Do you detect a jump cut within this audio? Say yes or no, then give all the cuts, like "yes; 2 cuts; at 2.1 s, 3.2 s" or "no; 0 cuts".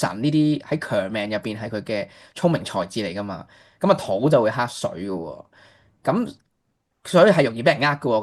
no; 0 cuts